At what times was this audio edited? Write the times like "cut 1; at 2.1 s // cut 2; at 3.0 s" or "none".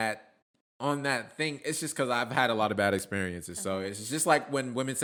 none